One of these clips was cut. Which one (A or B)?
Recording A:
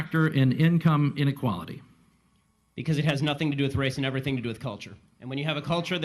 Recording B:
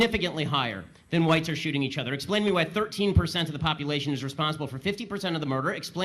A